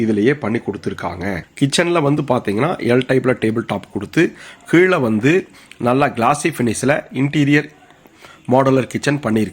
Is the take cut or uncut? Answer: cut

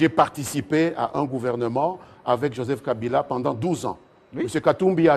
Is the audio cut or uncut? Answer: uncut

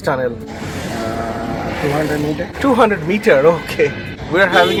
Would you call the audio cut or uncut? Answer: uncut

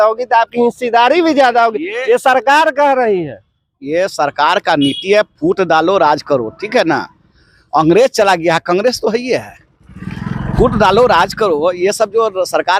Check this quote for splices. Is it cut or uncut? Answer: uncut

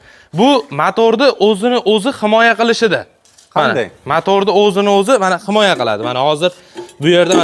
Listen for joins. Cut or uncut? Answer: uncut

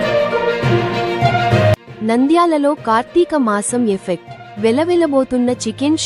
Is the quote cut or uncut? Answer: uncut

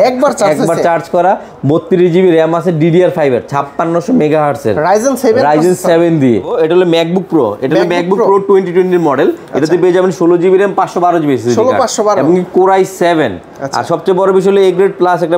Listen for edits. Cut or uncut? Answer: cut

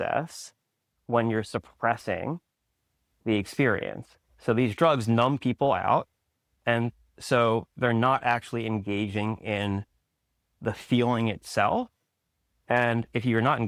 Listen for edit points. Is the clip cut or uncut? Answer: uncut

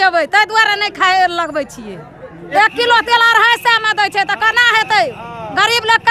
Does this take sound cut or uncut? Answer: cut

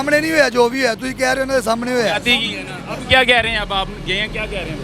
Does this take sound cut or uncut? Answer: uncut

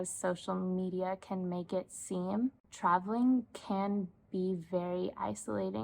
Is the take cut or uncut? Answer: cut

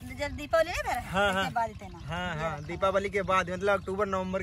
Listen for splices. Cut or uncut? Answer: uncut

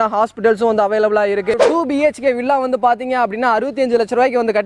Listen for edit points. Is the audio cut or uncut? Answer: cut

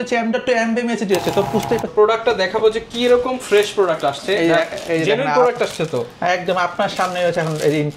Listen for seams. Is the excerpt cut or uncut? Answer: cut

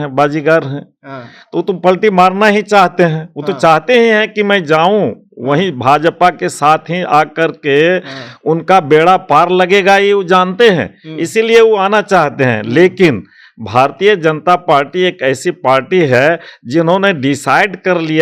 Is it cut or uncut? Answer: uncut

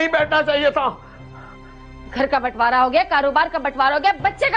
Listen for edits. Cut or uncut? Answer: uncut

